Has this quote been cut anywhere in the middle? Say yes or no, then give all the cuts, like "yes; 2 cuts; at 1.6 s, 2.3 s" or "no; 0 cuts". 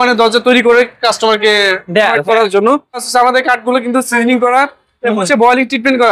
yes; 1 cut; at 3.0 s